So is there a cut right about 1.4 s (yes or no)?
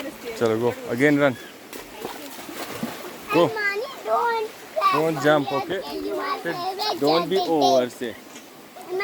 no